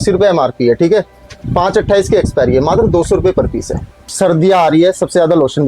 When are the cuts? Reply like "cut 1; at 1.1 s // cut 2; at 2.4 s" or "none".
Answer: cut 1; at 4.0 s